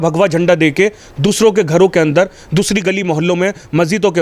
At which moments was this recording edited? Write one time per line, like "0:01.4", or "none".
none